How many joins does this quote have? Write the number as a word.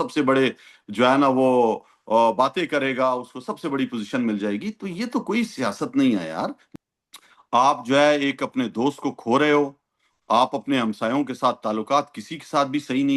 one